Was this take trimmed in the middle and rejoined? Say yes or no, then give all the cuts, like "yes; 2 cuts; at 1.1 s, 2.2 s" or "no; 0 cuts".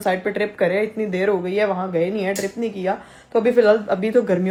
no; 0 cuts